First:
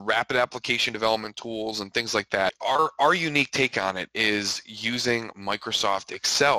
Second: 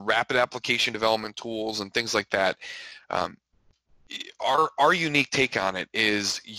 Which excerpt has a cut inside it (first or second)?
first